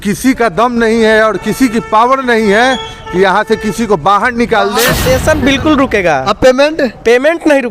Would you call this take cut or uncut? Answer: cut